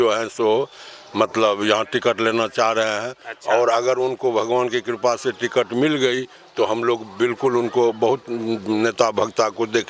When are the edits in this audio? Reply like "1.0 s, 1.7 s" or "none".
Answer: none